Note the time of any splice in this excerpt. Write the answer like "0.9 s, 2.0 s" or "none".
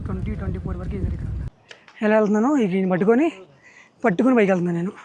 1.4 s

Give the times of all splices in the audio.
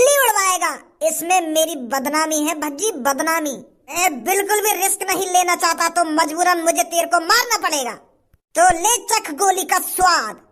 4.0 s

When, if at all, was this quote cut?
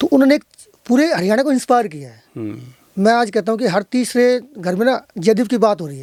none

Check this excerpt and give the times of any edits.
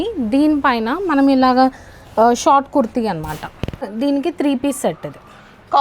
3.9 s

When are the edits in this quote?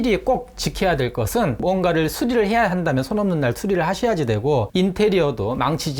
1.6 s

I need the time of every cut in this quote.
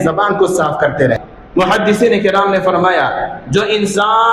1.3 s

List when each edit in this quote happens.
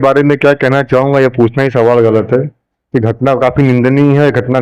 none

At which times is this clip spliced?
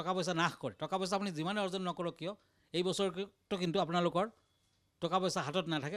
none

